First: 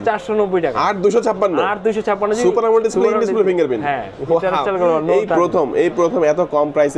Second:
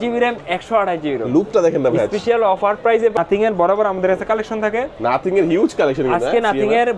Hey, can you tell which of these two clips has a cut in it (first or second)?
second